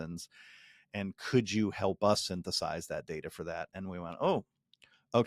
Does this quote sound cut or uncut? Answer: uncut